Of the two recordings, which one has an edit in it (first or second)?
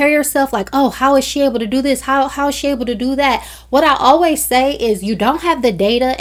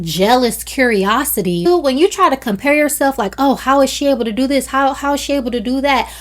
second